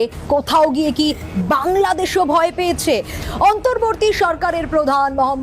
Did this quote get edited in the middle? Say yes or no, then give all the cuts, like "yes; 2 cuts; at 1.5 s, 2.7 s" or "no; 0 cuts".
no; 0 cuts